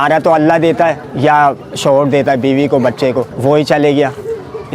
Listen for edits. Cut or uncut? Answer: cut